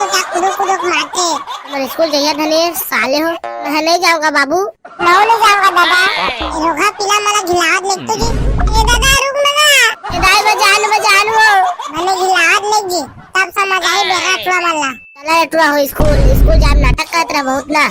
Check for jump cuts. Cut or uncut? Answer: uncut